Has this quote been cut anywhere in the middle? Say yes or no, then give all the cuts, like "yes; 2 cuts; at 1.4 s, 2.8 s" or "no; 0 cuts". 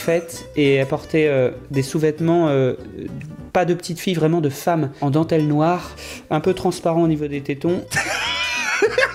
no; 0 cuts